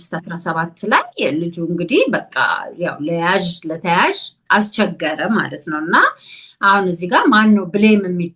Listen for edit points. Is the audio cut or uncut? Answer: uncut